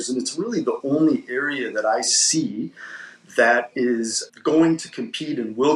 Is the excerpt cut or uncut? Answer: cut